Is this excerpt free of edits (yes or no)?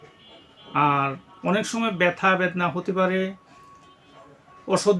yes